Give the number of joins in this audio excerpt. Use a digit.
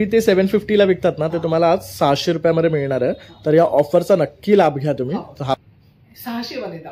1